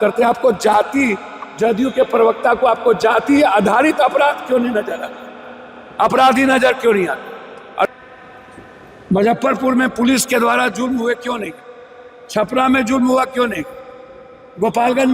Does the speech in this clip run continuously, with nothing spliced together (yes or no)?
no